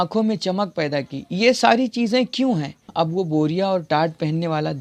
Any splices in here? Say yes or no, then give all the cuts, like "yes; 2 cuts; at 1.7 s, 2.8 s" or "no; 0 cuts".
yes; 1 cut; at 2.8 s